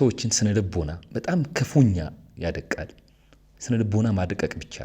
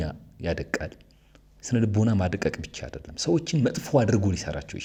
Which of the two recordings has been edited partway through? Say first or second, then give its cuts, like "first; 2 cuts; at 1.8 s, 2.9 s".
first; 1 cut; at 1.0 s